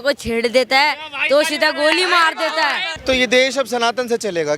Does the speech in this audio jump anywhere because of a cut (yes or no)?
yes